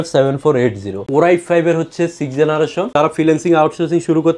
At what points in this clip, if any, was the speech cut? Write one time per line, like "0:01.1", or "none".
0:01.0
0:02.9

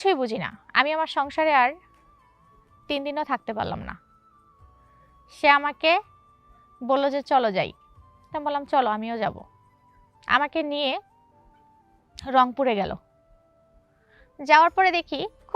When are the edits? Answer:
0:04.0
0:05.4

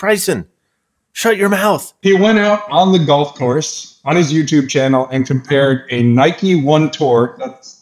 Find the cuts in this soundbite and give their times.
0:01.9

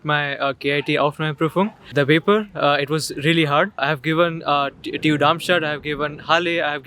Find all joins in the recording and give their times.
0:01.9
0:03.8

